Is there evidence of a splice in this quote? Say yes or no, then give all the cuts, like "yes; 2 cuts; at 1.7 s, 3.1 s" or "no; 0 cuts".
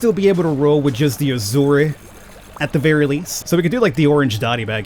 yes; 1 cut; at 3.3 s